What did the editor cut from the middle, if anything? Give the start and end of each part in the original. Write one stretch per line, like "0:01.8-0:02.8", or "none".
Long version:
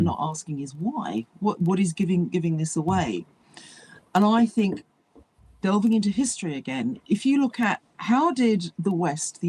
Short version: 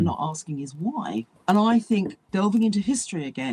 0:01.3-0:04.0
0:04.9-0:05.5